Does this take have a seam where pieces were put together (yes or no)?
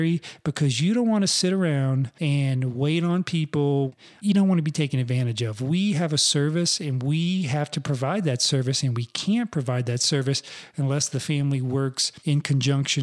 yes